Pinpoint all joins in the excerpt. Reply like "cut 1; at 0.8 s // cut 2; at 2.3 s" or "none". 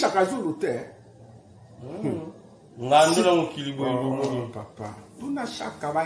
none